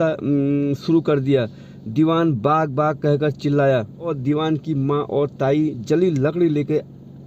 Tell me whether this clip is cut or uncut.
cut